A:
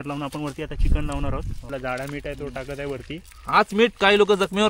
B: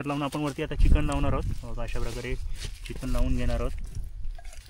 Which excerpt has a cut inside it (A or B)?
A